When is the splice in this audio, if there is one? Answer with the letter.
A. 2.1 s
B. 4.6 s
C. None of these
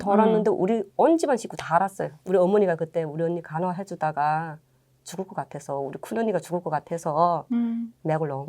A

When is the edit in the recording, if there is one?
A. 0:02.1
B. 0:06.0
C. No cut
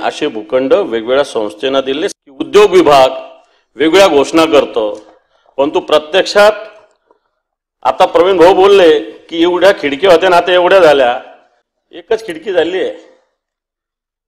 A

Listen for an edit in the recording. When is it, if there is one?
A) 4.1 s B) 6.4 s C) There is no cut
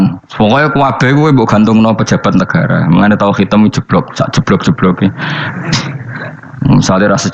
B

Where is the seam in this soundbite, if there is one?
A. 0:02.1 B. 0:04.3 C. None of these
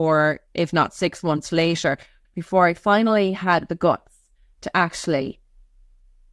A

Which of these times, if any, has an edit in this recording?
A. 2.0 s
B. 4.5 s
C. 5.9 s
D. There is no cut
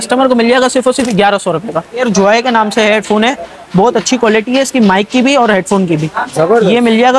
A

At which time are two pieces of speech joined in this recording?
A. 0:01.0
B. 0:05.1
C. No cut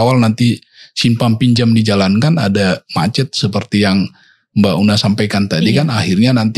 C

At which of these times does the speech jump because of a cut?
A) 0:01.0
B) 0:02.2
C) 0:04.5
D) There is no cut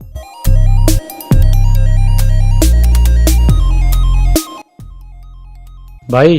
C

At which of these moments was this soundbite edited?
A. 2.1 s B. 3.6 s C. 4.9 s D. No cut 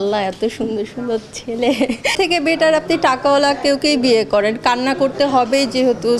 A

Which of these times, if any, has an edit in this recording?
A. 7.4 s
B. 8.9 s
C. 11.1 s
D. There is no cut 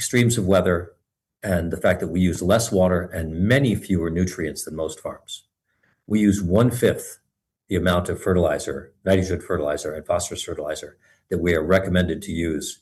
D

